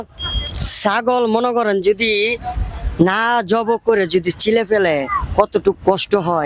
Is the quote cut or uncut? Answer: uncut